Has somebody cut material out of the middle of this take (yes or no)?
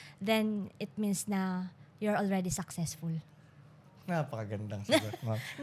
no